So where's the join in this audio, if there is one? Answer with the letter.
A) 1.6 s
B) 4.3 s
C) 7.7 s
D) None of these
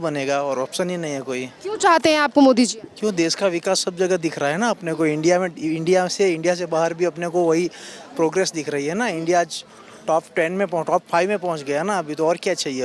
D